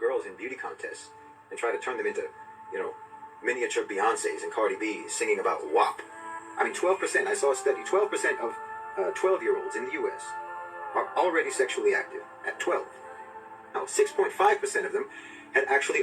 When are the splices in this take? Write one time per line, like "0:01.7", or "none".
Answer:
0:04.8